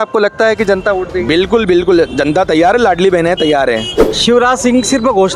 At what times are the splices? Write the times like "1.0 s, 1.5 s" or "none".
4.1 s